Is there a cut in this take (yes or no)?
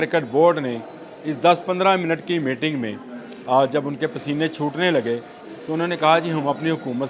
no